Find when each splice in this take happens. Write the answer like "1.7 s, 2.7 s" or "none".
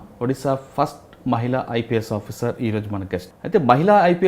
3.3 s